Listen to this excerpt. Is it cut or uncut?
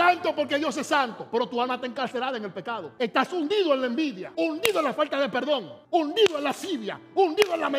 cut